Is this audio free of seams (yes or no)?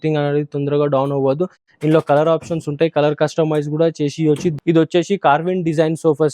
no